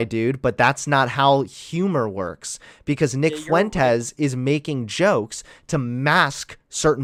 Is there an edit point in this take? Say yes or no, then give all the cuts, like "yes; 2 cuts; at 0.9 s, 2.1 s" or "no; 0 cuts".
no; 0 cuts